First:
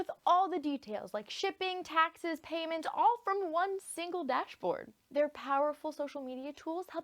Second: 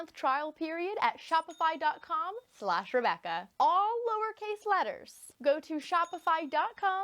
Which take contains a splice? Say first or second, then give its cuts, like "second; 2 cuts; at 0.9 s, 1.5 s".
first; 1 cut; at 4.9 s